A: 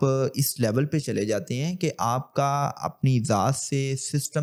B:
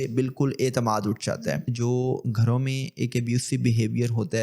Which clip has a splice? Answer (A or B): B